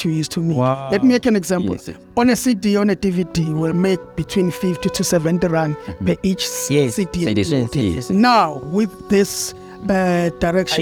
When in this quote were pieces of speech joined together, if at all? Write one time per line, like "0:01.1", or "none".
none